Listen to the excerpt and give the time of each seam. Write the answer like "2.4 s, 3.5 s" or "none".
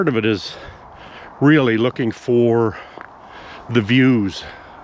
none